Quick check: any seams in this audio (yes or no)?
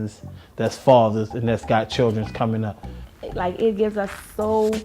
yes